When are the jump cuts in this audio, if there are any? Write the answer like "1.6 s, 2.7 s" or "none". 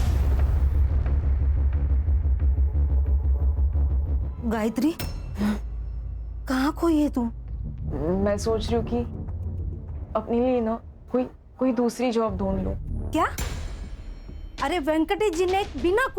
4.3 s